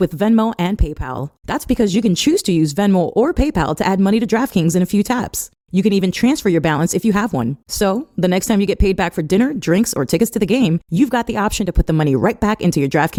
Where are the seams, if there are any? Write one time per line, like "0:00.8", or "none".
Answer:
none